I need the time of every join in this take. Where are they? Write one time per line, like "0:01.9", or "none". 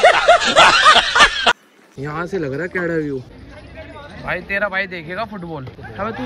0:01.5